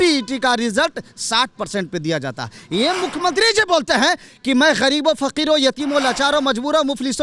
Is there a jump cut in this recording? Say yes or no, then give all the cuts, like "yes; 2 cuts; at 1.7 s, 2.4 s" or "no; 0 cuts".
no; 0 cuts